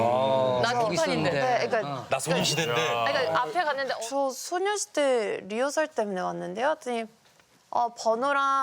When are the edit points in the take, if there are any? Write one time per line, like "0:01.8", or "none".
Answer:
0:03.9